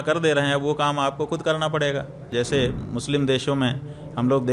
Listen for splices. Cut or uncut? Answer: cut